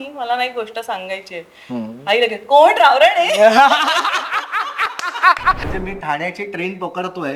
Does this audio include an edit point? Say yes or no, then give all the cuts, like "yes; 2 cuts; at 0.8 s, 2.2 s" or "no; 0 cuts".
yes; 1 cut; at 5.6 s